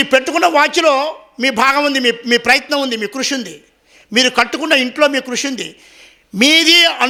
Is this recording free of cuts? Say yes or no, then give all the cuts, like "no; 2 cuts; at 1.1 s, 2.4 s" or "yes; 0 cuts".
yes; 0 cuts